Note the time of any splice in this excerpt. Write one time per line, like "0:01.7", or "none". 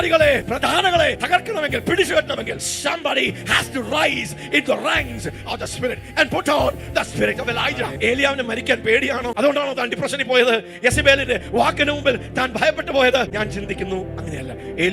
0:00.9
0:02.7
0:07.9
0:09.3
0:13.3